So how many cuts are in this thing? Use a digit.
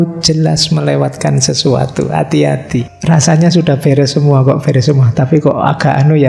1